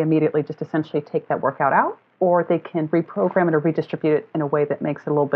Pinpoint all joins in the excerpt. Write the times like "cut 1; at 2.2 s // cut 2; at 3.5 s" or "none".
none